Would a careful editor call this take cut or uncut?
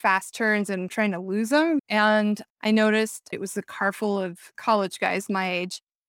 cut